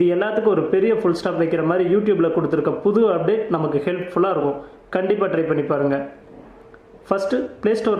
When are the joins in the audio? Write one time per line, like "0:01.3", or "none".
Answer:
none